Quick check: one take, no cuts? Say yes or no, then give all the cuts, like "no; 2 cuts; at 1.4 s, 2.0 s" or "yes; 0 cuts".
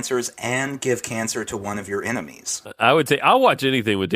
no; 1 cut; at 2.5 s